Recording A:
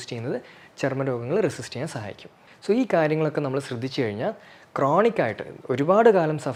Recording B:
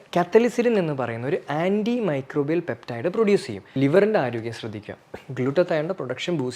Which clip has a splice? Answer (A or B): B